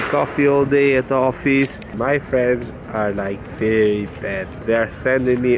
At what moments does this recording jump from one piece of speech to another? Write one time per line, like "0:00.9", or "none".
0:01.9
0:04.6